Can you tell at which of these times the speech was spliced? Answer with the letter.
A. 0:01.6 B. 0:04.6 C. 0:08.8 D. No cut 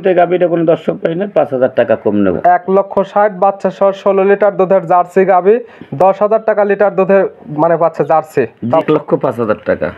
C